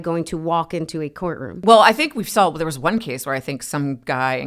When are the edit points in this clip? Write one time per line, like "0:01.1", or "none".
0:01.6